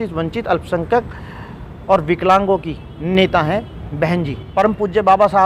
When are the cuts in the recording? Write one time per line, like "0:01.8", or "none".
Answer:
0:04.4